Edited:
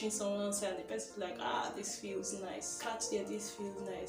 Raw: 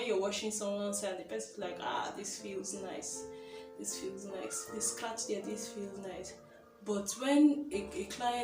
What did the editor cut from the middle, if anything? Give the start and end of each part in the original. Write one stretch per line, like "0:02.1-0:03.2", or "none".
0:03.1-0:04.9